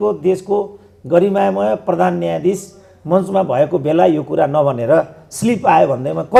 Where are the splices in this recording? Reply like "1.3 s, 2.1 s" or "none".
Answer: none